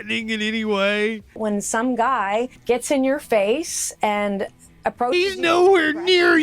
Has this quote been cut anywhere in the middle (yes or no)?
yes